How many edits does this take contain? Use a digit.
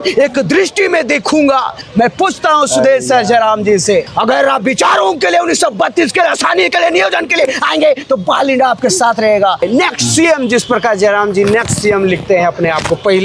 3